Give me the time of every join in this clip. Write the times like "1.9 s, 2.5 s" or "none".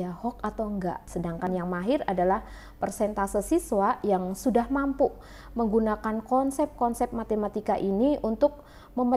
1.1 s